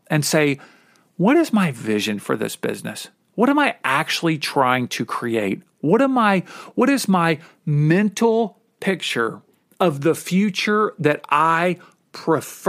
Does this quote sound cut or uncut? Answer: uncut